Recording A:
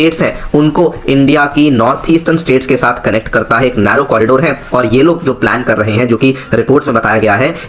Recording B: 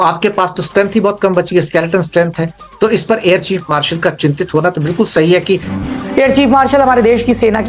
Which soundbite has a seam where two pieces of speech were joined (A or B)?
B